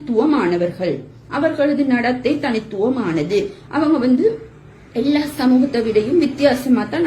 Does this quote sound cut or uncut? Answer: uncut